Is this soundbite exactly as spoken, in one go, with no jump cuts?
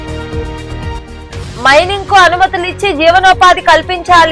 yes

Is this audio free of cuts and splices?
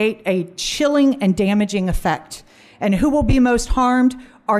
yes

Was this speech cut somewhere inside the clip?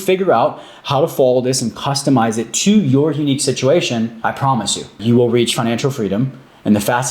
yes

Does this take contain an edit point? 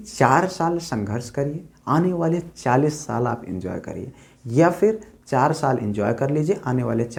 no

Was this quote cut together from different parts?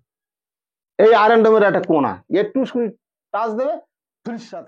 no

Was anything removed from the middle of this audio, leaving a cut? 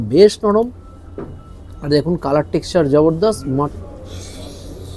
yes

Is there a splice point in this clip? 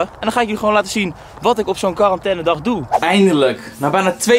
yes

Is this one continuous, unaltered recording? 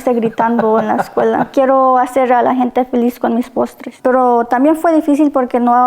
no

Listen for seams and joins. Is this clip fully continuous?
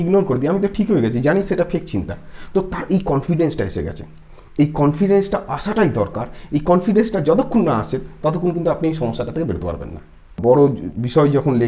no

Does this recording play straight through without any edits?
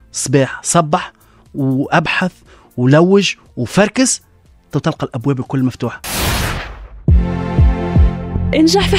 no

